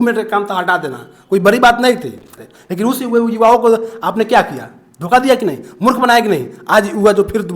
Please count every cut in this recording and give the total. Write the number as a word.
one